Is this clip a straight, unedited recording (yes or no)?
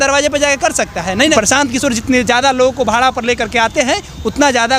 no